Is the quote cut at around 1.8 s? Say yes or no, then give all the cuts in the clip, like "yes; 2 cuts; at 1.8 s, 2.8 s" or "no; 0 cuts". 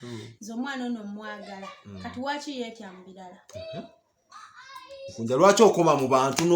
no; 0 cuts